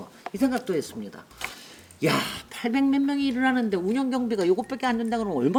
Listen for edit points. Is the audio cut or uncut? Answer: uncut